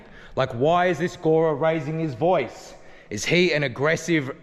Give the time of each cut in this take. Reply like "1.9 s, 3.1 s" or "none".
none